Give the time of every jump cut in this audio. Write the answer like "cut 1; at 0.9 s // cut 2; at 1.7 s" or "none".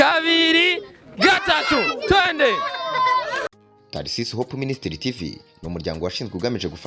cut 1; at 3.4 s

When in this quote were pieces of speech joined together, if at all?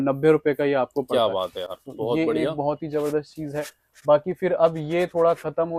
none

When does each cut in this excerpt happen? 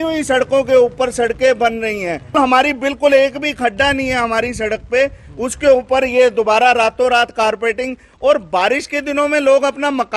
cut 1; at 2.3 s

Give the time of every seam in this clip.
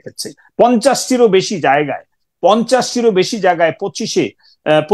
none

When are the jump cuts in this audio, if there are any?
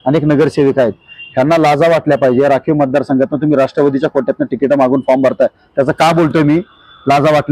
none

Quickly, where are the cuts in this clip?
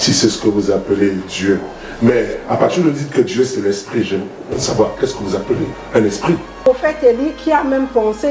cut 1; at 6.7 s

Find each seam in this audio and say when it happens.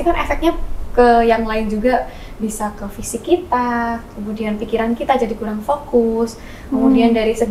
none

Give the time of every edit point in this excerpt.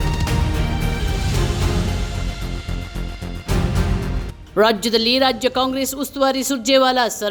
none

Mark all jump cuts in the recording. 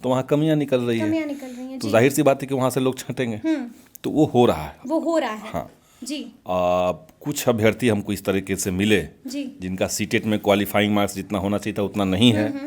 none

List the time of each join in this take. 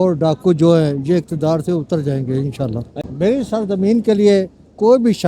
cut 1; at 3.0 s

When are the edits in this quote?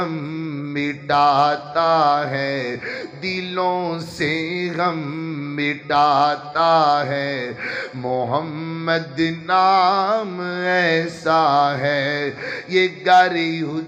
none

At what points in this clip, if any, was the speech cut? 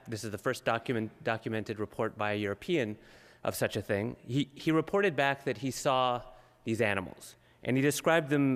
none

